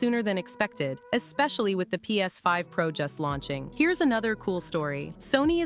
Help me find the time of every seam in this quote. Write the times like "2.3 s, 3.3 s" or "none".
3.6 s

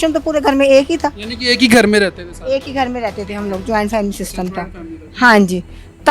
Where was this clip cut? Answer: none

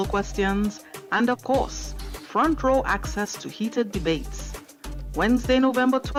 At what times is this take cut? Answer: none

